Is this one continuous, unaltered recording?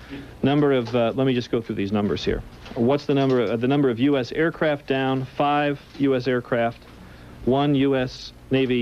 no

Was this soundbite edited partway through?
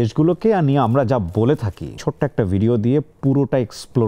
yes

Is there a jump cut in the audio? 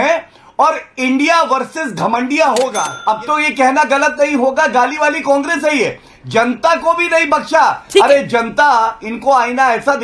yes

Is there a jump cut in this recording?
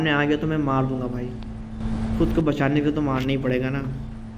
no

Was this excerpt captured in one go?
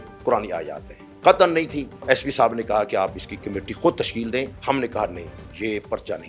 no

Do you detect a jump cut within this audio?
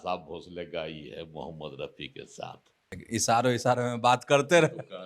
yes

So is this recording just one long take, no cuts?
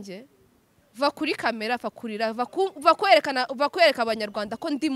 yes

